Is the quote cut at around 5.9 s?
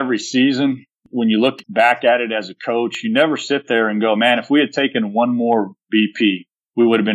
no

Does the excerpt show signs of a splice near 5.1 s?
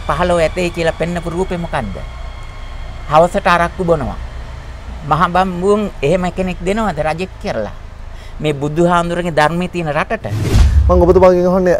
no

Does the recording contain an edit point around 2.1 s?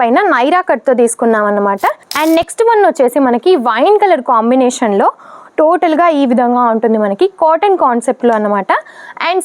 yes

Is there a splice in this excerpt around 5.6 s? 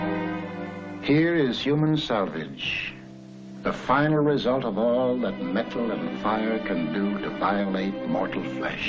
no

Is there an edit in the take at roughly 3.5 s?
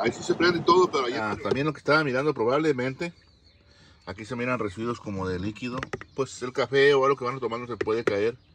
no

